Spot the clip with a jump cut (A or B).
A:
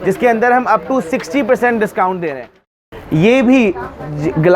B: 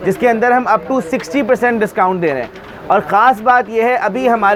A